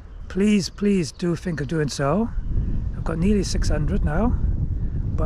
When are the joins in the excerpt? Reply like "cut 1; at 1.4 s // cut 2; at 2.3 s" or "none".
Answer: none